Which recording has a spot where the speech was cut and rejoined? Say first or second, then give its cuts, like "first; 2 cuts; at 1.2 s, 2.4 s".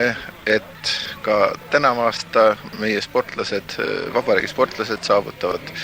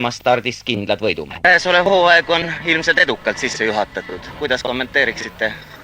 second; 1 cut; at 1.5 s